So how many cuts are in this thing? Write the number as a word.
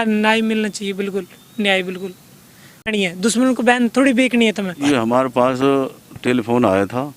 one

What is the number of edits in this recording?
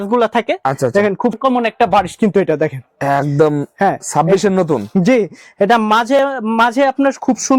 one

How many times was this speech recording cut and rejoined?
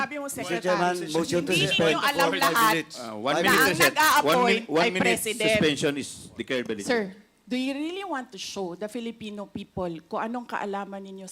one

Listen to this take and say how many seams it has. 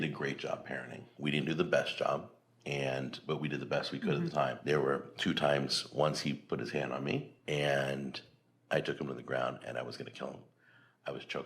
two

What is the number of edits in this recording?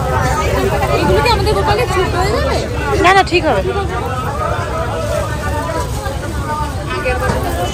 zero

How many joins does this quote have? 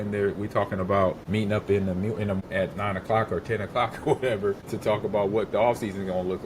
three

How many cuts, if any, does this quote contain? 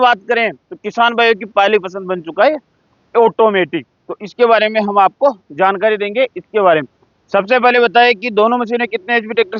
zero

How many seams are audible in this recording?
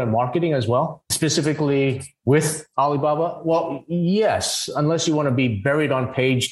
two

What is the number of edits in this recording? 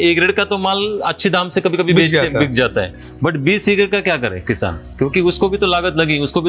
zero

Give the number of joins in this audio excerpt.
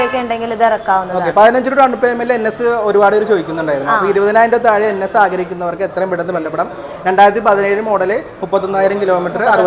zero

